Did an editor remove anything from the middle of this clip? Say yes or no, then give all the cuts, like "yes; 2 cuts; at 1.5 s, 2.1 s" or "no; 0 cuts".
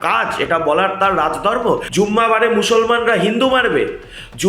yes; 1 cut; at 1.9 s